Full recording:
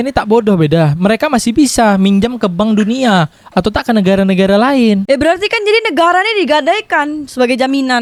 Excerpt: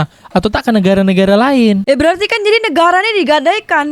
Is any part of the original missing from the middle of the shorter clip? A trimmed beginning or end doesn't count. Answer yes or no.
no